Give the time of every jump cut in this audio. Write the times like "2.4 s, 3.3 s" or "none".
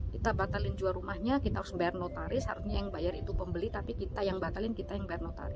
none